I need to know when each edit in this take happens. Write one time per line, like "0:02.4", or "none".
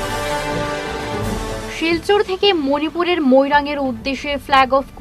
0:01.2